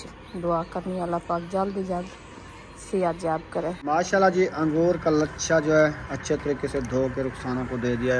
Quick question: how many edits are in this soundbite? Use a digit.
1